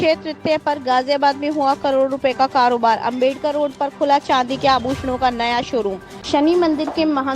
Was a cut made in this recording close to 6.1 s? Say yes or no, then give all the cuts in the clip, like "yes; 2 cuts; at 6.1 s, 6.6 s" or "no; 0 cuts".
yes; 1 cut; at 6.1 s